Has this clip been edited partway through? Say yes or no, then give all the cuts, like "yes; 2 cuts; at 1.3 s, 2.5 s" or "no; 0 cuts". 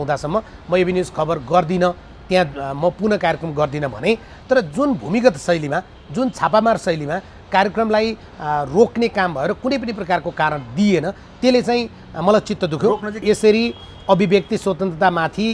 yes; 2 cuts; at 4.3 s, 13.1 s